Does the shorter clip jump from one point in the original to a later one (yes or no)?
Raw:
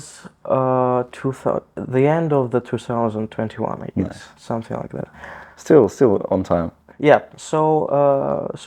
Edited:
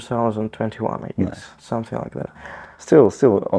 no